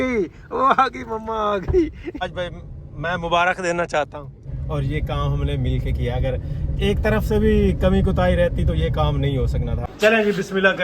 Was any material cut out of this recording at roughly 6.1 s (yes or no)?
no